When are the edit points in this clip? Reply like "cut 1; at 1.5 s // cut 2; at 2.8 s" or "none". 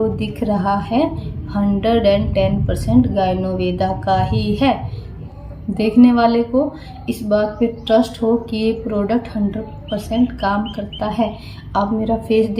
cut 1; at 5.4 s